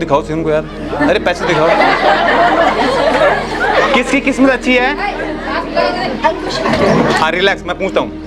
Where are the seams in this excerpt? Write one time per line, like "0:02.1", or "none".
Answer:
none